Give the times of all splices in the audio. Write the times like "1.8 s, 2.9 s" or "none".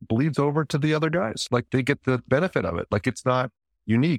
1.7 s